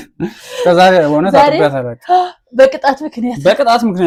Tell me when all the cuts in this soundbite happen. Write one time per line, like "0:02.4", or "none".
none